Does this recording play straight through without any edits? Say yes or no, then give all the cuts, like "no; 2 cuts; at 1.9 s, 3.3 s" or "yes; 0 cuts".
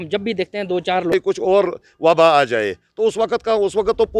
no; 1 cut; at 1.1 s